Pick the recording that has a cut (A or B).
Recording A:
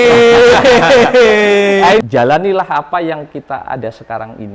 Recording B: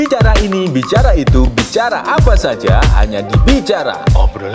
A